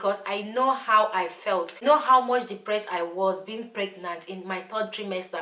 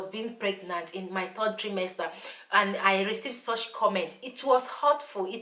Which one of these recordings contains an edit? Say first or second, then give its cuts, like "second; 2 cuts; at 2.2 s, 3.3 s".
first; 1 cut; at 1.8 s